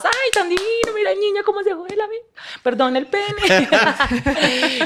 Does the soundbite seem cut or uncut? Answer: uncut